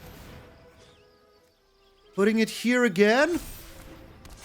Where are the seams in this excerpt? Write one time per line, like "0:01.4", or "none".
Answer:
0:01.6